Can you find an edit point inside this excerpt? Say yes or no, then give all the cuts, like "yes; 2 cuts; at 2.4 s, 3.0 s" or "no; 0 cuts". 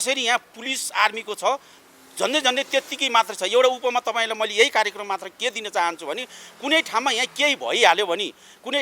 no; 0 cuts